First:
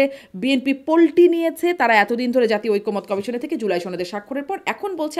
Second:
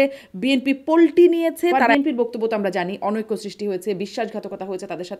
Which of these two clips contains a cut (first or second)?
second